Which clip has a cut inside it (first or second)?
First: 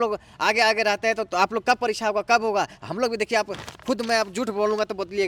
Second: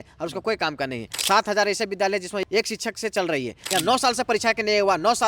second